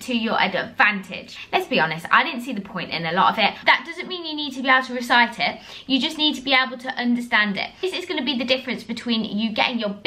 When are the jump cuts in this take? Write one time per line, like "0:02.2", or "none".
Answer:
0:01.4
0:03.6
0:07.8